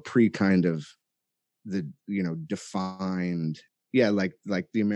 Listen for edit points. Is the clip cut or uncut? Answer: cut